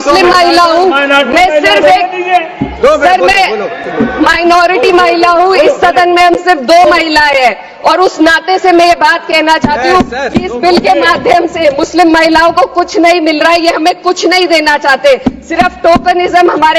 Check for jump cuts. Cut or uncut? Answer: uncut